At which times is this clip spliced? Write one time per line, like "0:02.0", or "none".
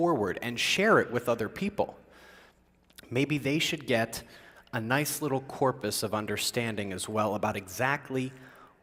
none